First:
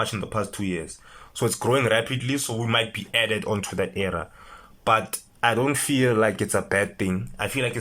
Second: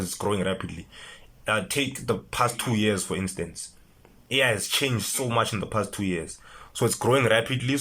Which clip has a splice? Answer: first; 1 cut; at 5.2 s

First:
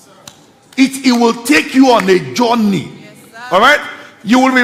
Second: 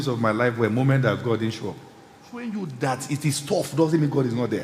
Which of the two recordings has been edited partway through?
second; 1 cut; at 2.4 s

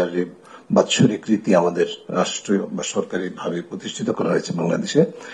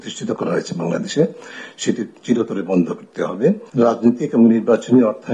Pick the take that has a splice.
second; 1 cut; at 3.7 s

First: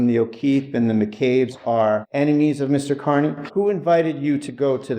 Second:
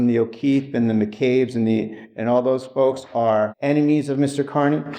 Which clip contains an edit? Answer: first; 2 cuts; at 1.5 s, 3.4 s

